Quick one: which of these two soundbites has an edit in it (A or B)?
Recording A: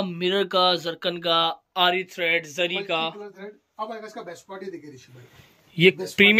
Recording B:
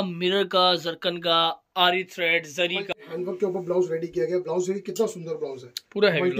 B